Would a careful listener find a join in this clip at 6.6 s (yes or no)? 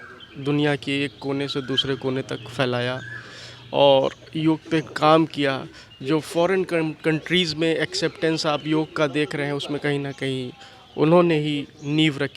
no